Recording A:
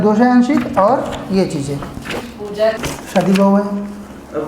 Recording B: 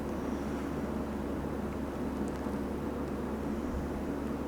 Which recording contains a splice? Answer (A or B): A